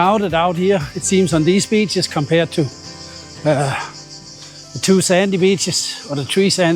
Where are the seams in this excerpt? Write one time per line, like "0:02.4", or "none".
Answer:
none